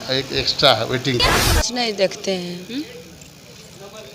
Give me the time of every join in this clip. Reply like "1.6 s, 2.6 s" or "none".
1.5 s